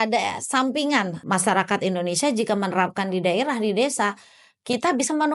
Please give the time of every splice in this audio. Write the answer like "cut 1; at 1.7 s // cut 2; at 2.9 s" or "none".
cut 1; at 1.2 s